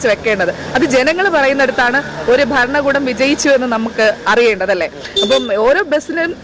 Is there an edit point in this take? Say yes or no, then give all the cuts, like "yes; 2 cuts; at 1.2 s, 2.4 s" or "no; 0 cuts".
no; 0 cuts